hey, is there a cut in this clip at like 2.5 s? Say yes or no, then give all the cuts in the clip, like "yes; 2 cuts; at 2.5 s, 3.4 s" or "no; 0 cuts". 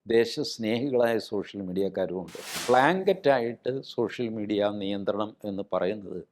yes; 1 cut; at 2.5 s